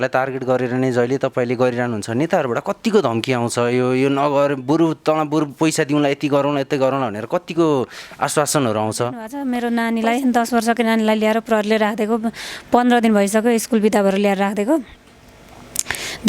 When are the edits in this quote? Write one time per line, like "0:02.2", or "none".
0:09.3